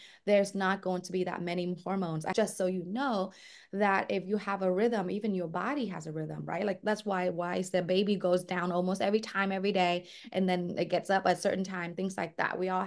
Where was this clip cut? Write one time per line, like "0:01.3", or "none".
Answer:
0:02.3